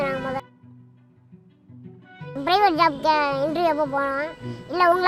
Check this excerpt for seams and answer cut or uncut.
uncut